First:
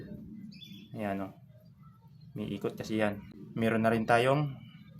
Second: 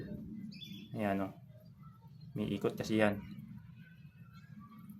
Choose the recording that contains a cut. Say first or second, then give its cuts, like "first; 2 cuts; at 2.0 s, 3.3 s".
first; 1 cut; at 3.4 s